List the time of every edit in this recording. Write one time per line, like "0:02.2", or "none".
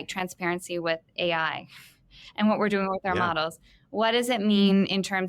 none